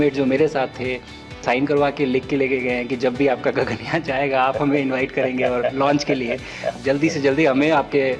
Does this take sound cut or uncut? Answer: cut